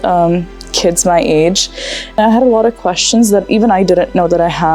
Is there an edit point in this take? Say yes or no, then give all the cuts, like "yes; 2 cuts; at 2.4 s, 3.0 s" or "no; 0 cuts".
yes; 1 cut; at 2.2 s